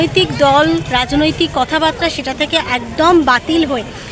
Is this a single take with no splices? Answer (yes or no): yes